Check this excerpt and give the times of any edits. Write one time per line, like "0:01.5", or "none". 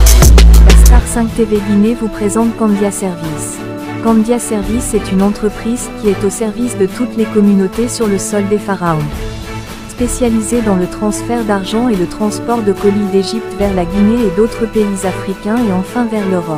0:00.9